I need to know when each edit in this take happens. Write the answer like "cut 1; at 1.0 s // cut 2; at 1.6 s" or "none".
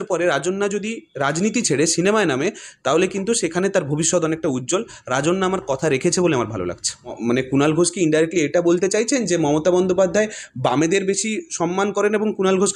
cut 1; at 7.2 s